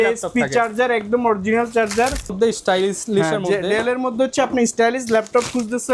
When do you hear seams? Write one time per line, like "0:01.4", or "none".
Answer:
0:02.3

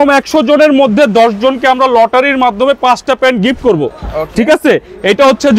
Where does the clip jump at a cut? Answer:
none

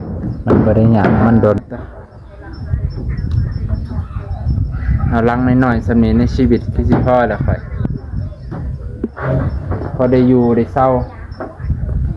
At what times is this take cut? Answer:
0:01.6

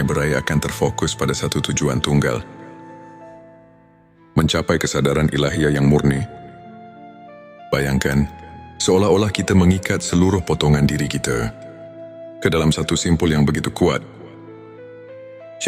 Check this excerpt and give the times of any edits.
0:02.8
0:04.3

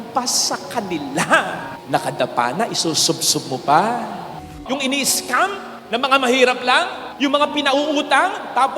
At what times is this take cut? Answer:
0:04.4

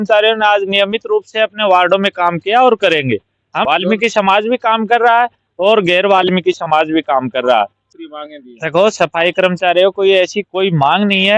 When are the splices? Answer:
0:03.6
0:07.8

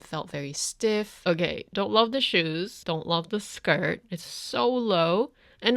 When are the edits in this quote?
0:01.1
0:02.8

